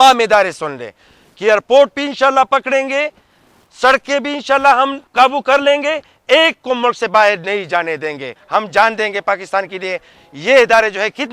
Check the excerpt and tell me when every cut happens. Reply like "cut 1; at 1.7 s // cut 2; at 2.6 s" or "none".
cut 1; at 5.0 s // cut 2; at 8.3 s